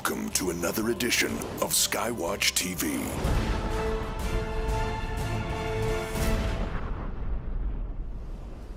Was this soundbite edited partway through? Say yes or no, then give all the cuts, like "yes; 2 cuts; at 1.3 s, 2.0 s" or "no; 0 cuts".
no; 0 cuts